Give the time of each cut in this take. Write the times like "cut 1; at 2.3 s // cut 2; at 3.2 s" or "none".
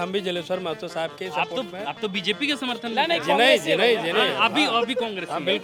none